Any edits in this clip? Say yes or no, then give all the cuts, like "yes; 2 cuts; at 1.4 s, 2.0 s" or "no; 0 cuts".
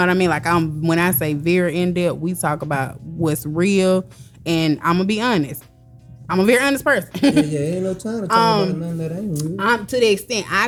no; 0 cuts